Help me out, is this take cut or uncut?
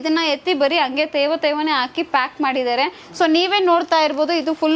uncut